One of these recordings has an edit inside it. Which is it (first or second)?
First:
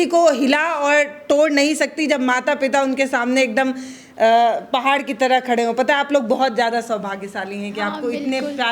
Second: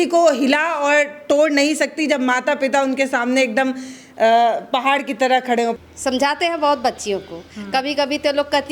second